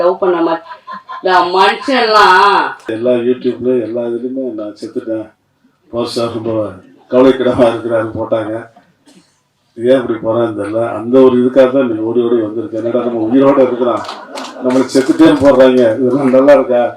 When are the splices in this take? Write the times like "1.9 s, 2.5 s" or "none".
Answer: 2.9 s